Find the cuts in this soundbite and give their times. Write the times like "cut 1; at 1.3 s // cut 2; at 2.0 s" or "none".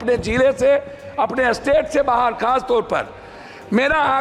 none